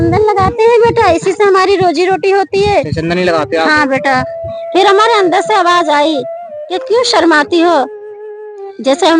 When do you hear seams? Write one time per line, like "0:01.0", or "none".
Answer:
0:04.4